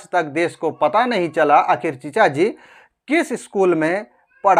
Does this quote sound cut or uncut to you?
uncut